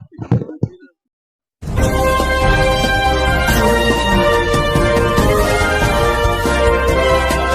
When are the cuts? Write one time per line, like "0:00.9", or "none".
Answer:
0:01.3